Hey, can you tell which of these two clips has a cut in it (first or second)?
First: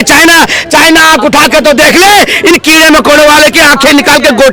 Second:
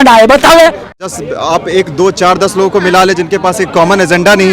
second